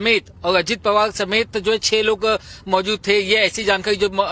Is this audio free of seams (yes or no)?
yes